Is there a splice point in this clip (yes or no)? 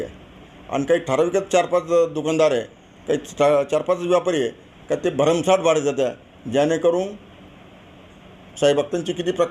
no